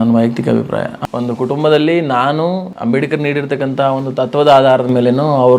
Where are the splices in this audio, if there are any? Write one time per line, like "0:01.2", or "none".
0:01.0
0:02.7